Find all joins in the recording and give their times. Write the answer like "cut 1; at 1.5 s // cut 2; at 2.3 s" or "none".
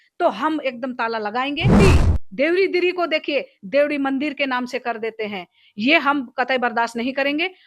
cut 1; at 1.8 s